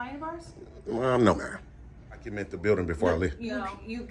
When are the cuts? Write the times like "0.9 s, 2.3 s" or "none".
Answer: 2.5 s